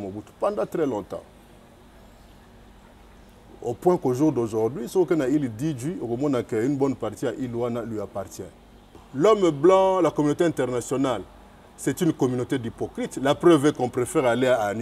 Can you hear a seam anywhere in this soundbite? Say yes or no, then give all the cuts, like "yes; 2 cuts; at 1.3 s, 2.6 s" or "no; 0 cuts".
yes; 1 cut; at 9.0 s